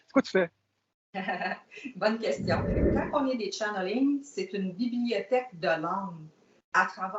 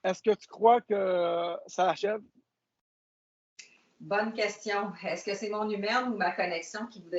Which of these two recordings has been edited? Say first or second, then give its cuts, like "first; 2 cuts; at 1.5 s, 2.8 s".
first; 1 cut; at 2.8 s